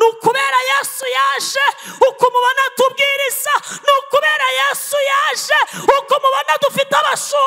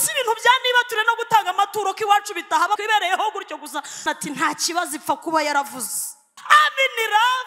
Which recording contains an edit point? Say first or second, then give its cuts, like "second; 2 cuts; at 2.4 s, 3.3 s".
second; 3 cuts; at 2.8 s, 4.0 s, 6.3 s